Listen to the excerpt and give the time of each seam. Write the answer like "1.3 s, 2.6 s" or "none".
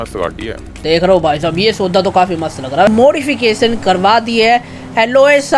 2.9 s